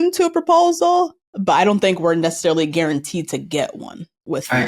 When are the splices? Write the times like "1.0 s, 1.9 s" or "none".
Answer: 1.2 s